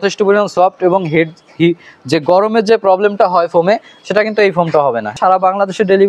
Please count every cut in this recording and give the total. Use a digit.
1